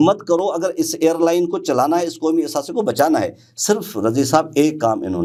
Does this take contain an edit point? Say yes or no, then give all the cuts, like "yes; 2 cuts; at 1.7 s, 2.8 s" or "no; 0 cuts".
no; 0 cuts